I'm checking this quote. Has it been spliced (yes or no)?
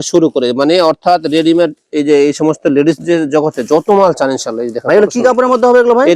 no